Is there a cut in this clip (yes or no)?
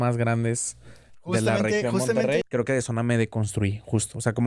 yes